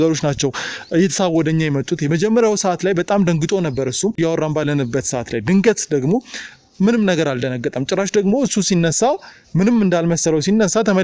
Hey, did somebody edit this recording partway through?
yes; 1 cut; at 4.2 s

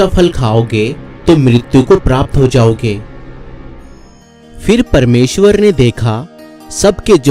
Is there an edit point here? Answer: no; 0 cuts

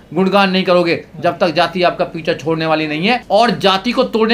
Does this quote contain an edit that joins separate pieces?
yes; 1 cut; at 3.2 s

